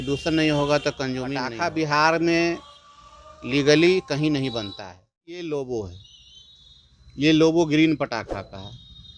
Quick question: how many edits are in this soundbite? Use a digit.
2